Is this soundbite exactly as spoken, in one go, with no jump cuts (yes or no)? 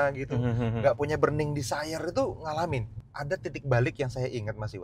no